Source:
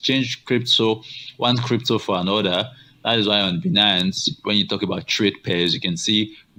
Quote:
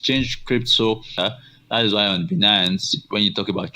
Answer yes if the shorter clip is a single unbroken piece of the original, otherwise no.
no